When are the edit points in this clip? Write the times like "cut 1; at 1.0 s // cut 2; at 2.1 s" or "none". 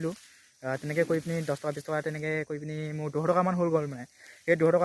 none